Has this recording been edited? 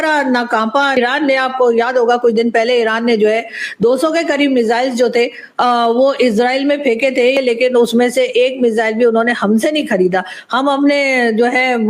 yes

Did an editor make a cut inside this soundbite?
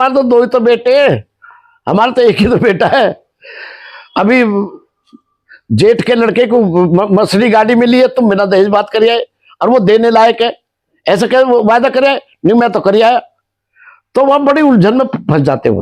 no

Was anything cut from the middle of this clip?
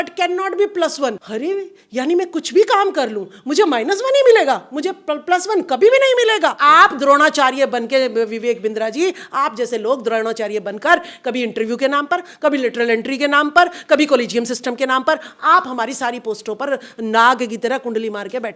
yes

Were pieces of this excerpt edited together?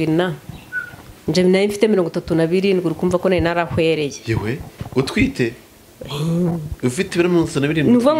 no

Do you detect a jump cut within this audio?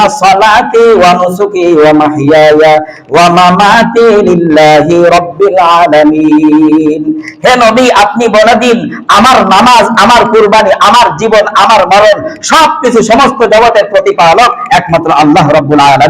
no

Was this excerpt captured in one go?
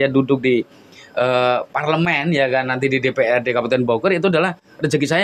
yes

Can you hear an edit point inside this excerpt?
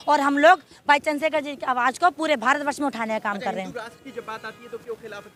no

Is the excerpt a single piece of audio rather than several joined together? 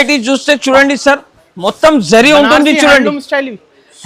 yes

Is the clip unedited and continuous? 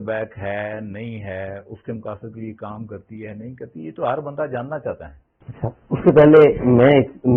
yes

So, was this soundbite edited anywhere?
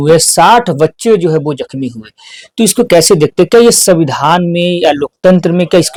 no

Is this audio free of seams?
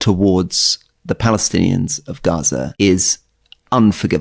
no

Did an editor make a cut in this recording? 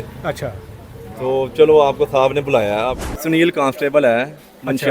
yes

